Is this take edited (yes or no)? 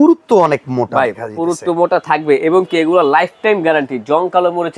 no